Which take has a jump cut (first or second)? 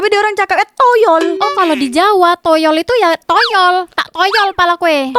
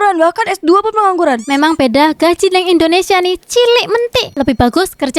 second